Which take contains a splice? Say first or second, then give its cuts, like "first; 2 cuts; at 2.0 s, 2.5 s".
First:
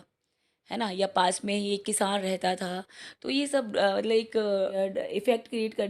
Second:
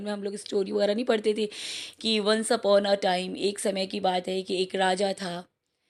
first; 1 cut; at 4.7 s